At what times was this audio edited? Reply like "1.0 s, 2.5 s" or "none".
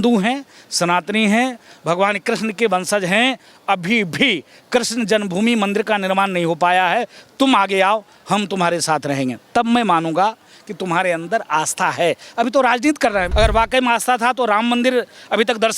13.3 s